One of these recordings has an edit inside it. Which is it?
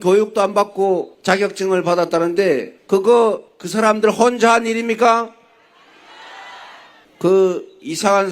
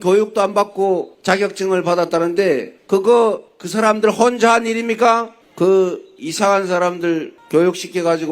second; 1 cut; at 5.4 s

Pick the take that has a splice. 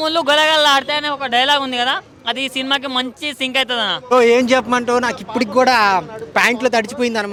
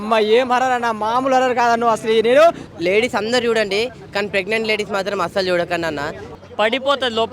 second; 2 cuts; at 2.7 s, 6.2 s

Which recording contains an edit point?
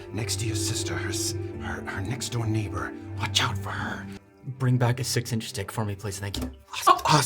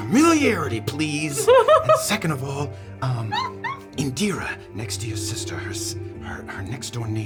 first; 1 cut; at 4.2 s

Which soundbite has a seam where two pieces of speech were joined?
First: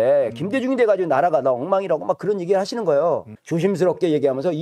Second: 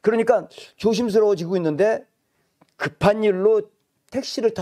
first; 1 cut; at 3.4 s

